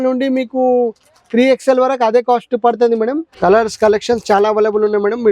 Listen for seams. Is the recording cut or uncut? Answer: cut